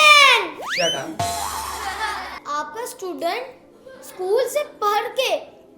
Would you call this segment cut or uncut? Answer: cut